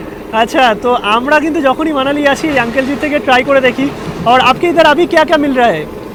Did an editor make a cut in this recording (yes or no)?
no